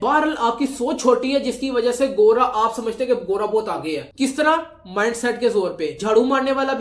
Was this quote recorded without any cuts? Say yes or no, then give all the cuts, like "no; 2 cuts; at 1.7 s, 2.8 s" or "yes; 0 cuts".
yes; 0 cuts